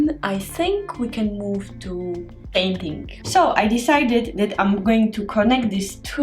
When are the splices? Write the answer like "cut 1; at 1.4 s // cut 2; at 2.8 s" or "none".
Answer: cut 1; at 3.1 s